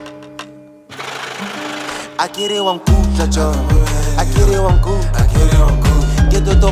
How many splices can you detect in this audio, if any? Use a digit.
0